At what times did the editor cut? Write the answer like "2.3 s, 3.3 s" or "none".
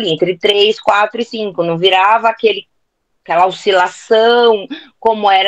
none